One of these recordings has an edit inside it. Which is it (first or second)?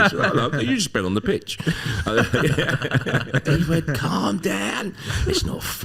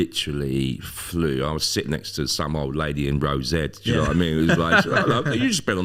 first